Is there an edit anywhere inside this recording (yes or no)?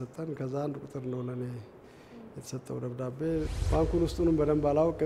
yes